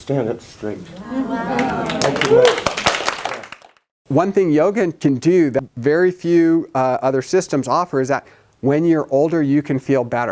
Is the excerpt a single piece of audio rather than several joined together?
no; 3 cuts; at 3.9 s, 4.9 s, 5.6 s

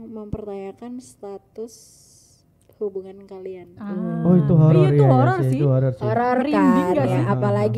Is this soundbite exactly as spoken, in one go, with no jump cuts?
yes; 0 cuts

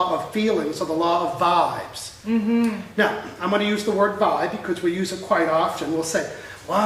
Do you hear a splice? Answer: no; 0 cuts

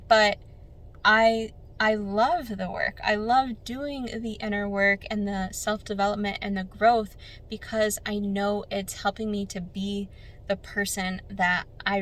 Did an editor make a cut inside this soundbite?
no; 0 cuts

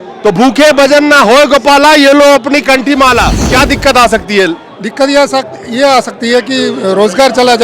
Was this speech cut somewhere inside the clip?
yes; 1 cut; at 3.4 s

